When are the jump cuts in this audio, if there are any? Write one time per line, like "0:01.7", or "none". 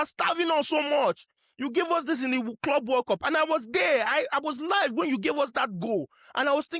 none